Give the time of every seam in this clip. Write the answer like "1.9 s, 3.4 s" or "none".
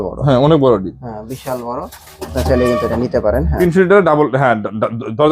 3.5 s